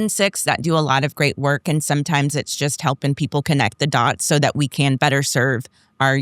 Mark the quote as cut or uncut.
cut